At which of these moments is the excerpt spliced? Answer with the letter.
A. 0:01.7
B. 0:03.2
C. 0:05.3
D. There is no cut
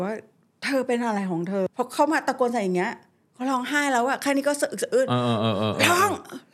A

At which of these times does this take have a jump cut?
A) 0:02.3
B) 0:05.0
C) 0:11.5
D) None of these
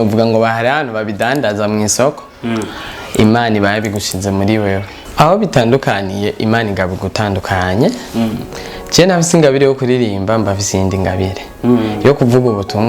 B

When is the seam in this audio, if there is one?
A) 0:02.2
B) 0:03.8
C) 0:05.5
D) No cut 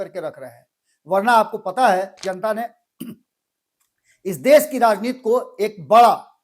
A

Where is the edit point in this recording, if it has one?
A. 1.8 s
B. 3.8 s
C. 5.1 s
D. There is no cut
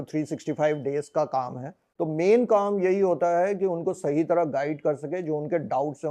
A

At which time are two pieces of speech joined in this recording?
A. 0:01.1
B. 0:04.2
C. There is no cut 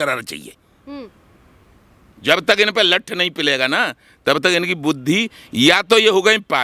C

